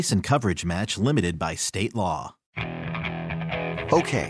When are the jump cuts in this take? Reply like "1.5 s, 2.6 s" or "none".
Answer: 2.5 s